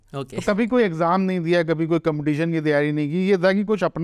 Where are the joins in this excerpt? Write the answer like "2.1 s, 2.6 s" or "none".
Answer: none